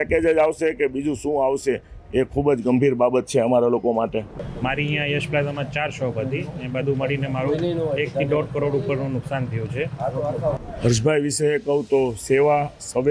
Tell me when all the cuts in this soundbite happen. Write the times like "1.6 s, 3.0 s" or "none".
4.5 s, 10.5 s